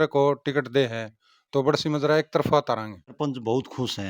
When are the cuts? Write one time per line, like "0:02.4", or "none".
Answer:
0:03.0